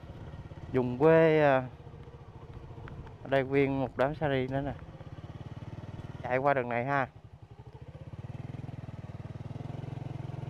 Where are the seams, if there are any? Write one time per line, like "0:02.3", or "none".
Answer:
0:06.3

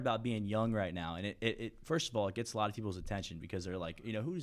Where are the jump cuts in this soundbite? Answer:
none

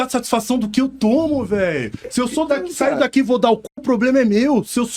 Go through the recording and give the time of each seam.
none

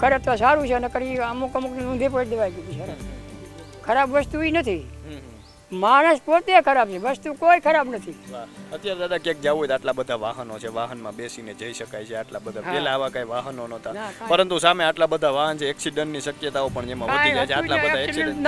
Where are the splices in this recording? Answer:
none

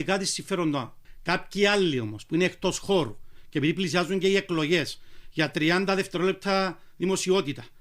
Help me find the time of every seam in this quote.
0:01.0

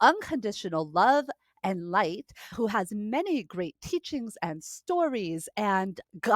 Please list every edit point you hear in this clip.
none

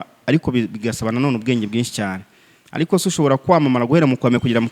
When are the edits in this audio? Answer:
none

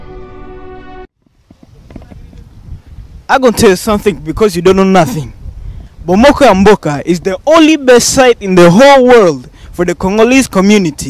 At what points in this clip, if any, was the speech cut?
0:01.0

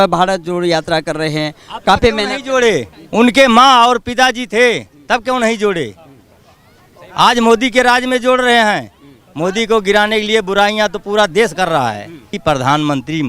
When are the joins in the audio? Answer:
0:12.3

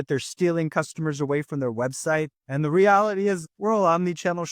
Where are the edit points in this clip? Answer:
0:02.4
0:03.5

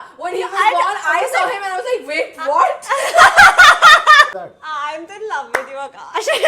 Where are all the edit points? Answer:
0:04.3

